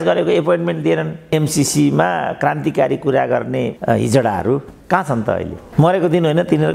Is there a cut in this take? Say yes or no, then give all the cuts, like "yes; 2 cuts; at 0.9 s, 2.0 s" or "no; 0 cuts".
yes; 1 cut; at 1.3 s